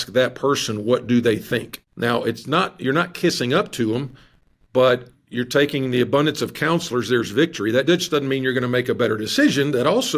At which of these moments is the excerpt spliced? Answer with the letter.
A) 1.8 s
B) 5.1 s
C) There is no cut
A